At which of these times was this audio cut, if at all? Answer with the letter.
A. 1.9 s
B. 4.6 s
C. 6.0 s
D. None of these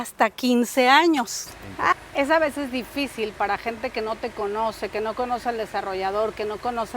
A